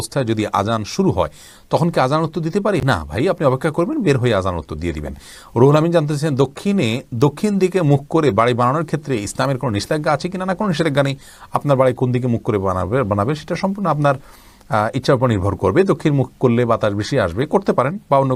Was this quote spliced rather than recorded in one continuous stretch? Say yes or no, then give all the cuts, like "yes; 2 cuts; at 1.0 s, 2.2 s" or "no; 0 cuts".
no; 0 cuts